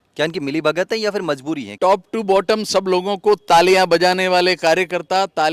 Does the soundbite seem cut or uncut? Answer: cut